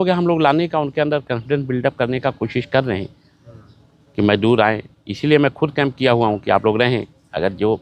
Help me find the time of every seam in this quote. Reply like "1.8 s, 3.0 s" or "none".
none

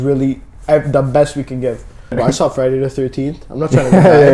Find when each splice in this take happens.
2.1 s

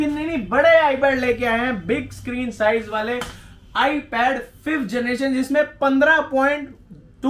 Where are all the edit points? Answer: none

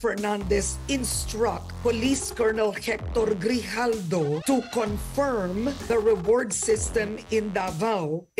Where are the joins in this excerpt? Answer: 1.7 s, 4.4 s, 5.8 s

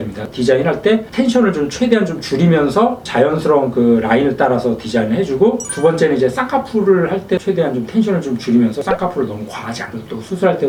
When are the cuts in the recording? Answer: none

